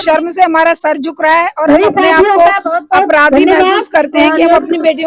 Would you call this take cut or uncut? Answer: uncut